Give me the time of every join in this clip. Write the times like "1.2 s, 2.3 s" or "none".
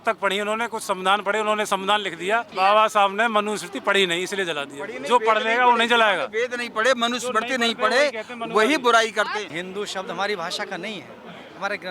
2.5 s, 9.5 s